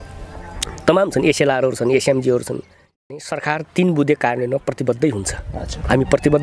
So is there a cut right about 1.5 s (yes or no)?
no